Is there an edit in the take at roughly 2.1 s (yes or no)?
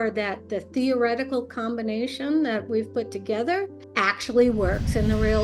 no